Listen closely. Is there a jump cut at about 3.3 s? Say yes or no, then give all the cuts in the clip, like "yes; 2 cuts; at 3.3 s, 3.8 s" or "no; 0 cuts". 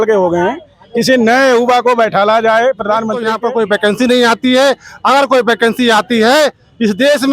yes; 1 cut; at 3.3 s